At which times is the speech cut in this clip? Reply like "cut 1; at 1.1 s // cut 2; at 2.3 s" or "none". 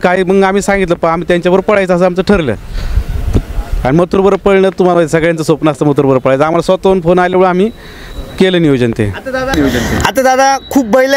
none

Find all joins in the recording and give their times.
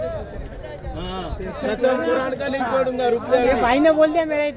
none

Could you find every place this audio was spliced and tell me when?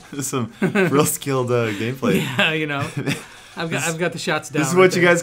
none

